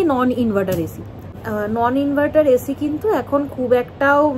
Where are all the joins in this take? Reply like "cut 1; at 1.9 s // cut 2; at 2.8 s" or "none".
cut 1; at 1.4 s